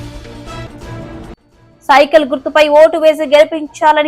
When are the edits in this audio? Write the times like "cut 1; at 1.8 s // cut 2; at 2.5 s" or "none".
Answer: cut 1; at 1.5 s